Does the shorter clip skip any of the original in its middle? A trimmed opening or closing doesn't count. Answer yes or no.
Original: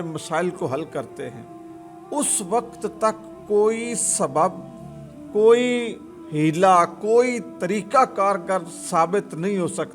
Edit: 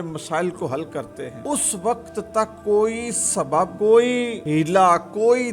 yes